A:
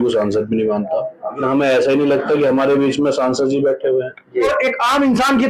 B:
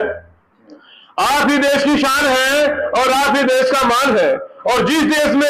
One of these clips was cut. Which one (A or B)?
A